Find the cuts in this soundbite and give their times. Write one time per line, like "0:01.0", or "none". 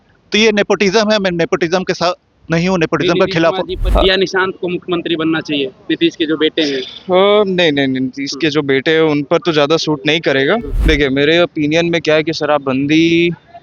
0:03.8
0:10.7